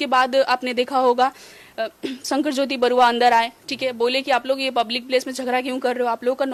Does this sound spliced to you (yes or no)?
no